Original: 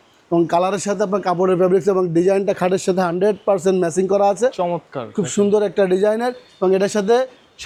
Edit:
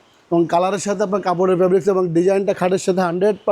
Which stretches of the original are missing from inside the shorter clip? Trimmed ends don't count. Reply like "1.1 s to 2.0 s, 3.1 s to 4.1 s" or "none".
none